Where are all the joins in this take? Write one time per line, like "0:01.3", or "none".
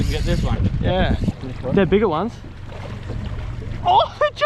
0:01.4